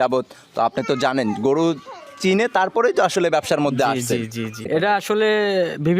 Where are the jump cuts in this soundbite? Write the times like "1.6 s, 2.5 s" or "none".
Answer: 4.7 s